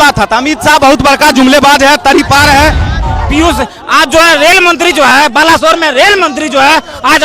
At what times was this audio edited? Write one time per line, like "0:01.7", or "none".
0:03.1

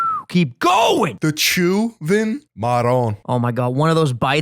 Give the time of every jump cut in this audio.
0:01.1
0:02.5
0:03.2

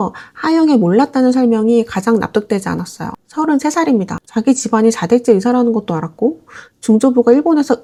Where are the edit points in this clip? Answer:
none

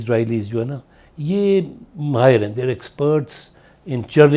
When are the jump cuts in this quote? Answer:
none

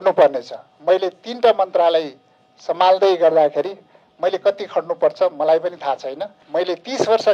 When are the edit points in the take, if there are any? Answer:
0:06.4

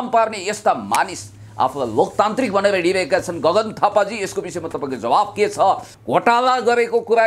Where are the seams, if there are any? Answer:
0:05.9

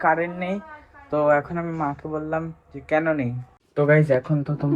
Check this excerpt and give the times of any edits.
0:03.5

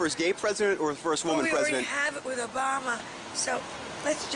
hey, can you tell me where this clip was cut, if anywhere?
none

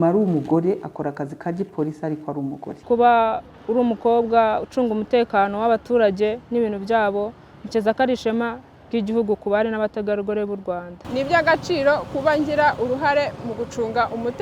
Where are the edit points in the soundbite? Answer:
0:02.7
0:03.5
0:11.0

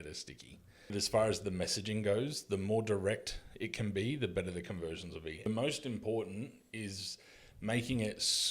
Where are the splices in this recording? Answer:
0:00.9
0:05.5

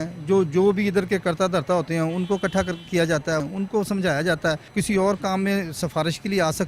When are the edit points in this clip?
0:03.5
0:04.7

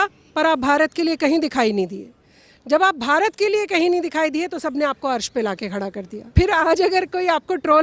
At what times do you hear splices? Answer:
0:06.2

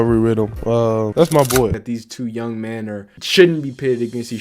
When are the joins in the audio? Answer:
0:01.9
0:03.1

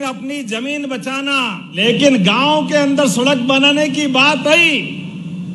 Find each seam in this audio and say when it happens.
0:01.6

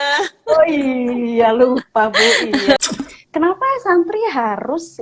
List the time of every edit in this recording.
0:02.9

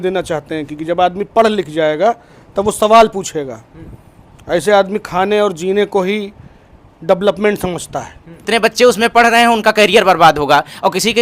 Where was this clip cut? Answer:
0:08.5

